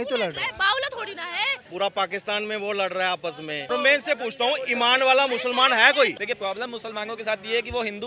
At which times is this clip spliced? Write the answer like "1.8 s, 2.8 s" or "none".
1.6 s, 3.7 s, 6.2 s